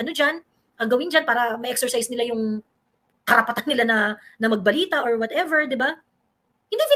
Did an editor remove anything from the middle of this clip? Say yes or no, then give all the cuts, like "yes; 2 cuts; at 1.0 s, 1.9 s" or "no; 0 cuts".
no; 0 cuts